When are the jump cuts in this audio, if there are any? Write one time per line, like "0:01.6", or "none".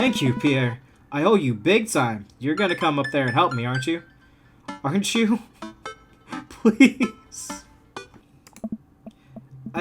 0:08.1